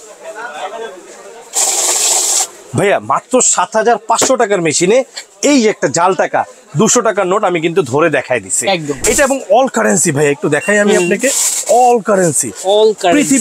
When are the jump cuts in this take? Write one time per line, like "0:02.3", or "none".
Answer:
0:09.0